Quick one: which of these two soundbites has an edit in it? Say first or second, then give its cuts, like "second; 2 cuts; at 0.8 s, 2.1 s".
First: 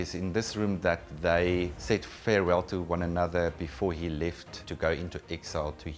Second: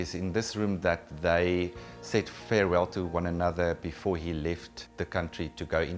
first; 2 cuts; at 1.8 s, 4.6 s